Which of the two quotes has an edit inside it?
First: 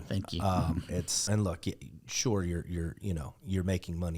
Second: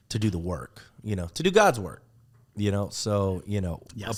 first; 1 cut; at 1.2 s

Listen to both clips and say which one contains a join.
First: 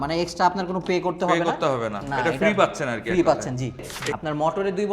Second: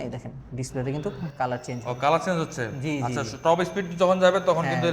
first; 1 cut; at 4.0 s

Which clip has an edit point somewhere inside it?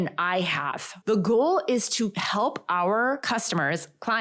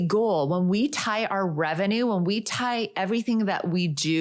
first; 3 cuts; at 0.9 s, 2.2 s, 3.2 s

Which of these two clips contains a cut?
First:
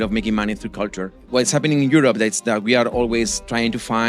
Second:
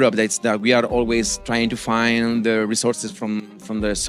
first; 1 cut; at 1.1 s

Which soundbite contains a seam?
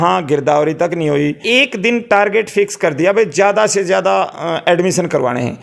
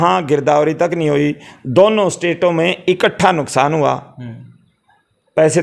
first; 1 cut; at 1.4 s

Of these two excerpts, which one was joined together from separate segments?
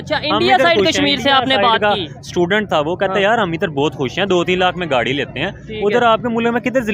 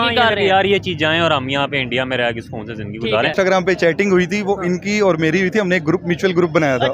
second; 1 cut; at 3.3 s

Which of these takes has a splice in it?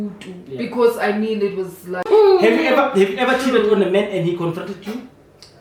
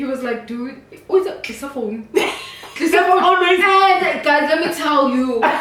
first; 1 cut; at 2.1 s

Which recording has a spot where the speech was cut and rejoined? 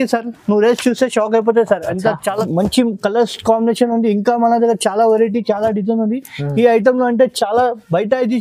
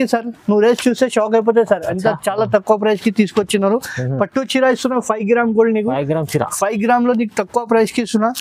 first; 1 cut; at 2.4 s

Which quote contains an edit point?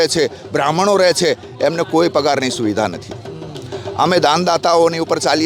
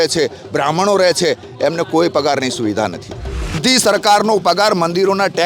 second; 1 cut; at 3.6 s

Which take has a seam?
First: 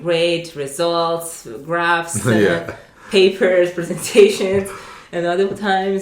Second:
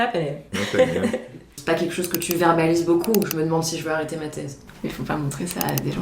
second; 2 cuts; at 1.5 s, 4.6 s

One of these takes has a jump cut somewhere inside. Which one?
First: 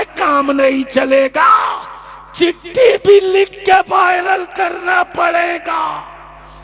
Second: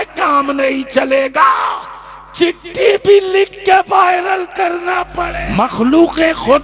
second; 1 cut; at 5.2 s

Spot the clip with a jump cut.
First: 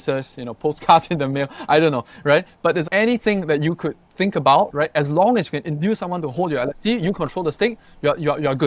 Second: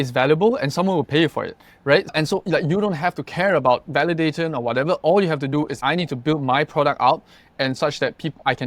second; 1 cut; at 2.1 s

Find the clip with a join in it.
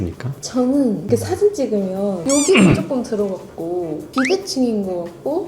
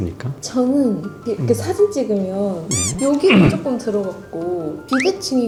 first; 2 cuts; at 1.0 s, 2.2 s

